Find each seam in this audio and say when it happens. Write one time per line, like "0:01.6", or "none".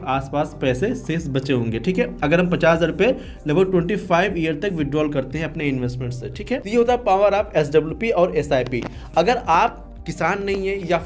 none

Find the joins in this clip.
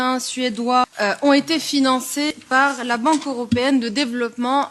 0:00.9
0:02.4

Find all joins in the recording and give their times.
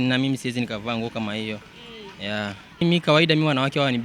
0:02.8

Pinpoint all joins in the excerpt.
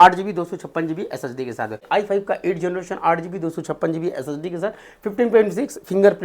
0:01.8

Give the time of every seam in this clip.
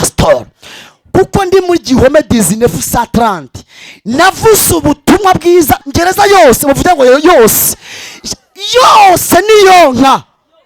0:05.9

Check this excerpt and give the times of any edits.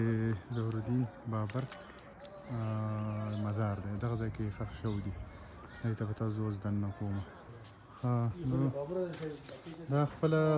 0:07.4

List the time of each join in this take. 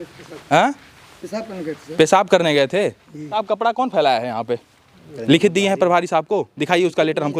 0:03.4
0:05.1

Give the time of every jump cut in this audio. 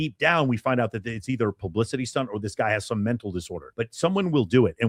none

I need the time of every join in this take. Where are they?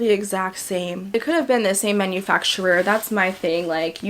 0:01.1

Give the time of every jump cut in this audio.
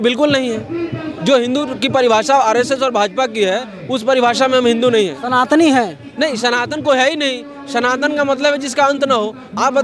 none

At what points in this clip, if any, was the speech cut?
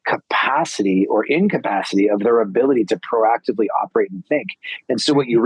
none

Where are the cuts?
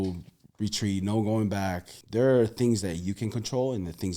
0:01.9

